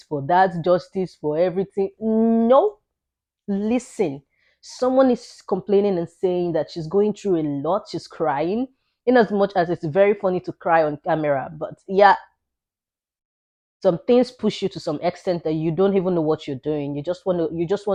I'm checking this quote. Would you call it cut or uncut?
uncut